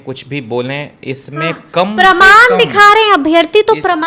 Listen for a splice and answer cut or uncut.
uncut